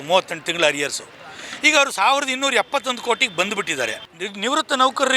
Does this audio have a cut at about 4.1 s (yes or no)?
yes